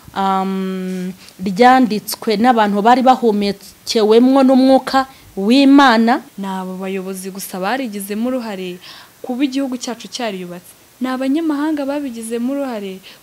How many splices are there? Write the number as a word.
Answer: one